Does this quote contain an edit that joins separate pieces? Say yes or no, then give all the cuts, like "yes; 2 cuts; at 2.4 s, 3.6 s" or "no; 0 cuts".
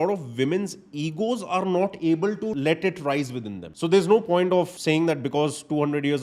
yes; 3 cuts; at 2.5 s, 3.6 s, 4.7 s